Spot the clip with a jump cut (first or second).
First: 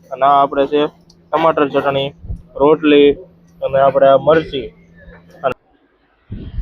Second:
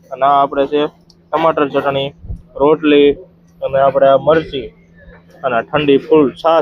first